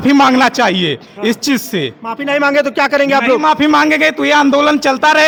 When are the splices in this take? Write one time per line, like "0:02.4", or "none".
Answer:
none

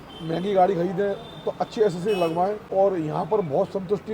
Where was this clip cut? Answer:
0:02.6

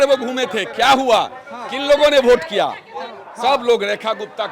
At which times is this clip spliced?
0:03.2

